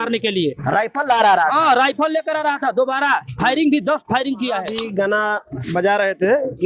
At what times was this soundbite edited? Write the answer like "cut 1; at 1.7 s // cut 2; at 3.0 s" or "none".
cut 1; at 4.8 s

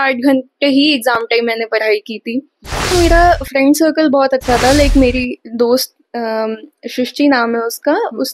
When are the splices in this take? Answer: cut 1; at 2.9 s

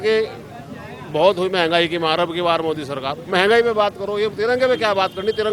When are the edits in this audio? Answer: none

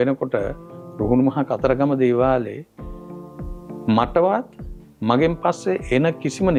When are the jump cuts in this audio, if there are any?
none

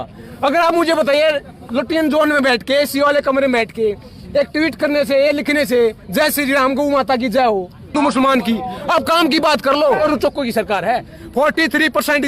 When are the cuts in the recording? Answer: cut 1; at 8.0 s // cut 2; at 10.0 s

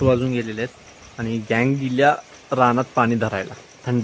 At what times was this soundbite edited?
none

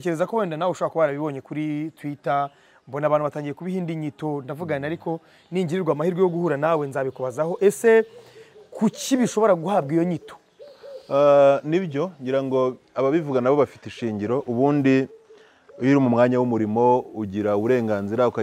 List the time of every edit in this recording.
none

